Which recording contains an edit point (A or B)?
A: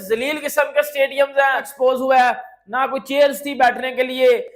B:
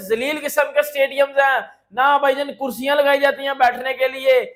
A